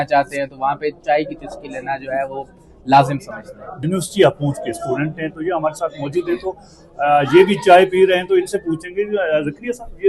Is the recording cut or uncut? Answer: uncut